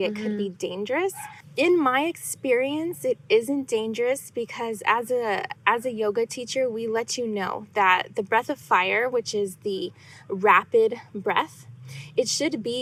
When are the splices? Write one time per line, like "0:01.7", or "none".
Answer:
none